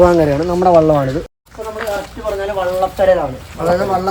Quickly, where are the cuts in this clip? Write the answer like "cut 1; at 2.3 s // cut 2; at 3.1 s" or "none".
cut 1; at 1.3 s